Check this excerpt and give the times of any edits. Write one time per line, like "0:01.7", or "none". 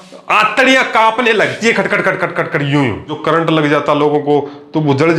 0:03.2